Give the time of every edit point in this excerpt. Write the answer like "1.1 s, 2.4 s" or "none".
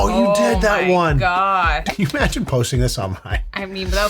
1.8 s